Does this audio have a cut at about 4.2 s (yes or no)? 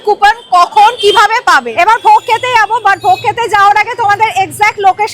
no